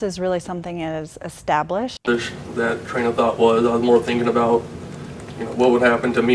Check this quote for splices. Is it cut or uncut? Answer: cut